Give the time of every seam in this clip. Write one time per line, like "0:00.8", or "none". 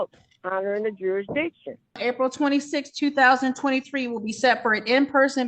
0:02.0